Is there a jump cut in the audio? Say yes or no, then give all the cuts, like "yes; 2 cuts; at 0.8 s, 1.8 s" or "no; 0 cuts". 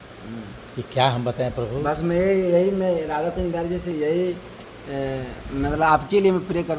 no; 0 cuts